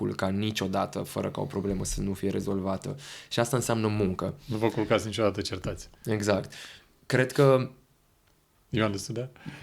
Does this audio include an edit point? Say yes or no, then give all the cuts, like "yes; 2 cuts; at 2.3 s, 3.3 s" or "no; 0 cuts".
no; 0 cuts